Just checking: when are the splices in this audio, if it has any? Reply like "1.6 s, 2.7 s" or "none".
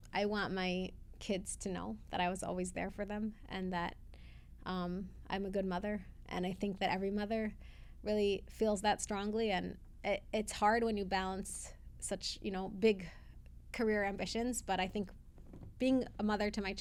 none